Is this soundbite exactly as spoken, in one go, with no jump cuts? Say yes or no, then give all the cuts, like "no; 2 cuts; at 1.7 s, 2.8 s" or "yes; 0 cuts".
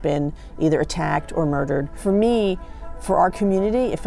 no; 1 cut; at 1.9 s